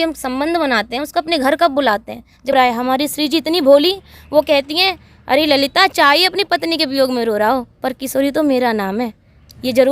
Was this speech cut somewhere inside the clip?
yes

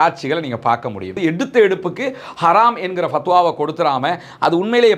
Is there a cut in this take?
yes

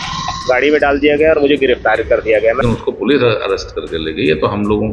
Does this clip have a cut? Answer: yes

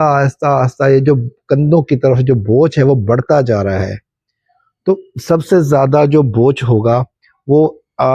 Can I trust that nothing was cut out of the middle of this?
yes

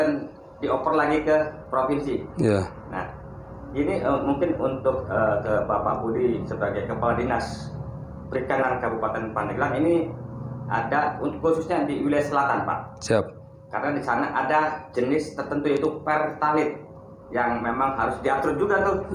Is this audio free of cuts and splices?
yes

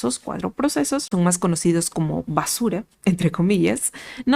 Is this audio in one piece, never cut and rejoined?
no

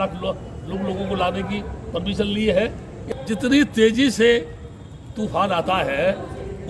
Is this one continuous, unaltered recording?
no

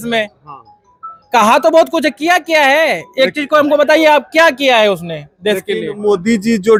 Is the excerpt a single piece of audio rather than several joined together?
yes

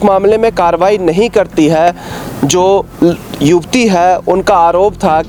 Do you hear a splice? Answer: no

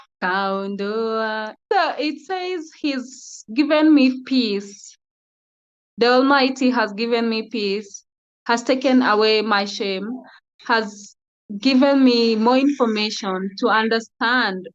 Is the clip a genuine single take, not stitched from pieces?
no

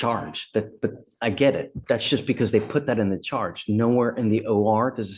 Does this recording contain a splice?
yes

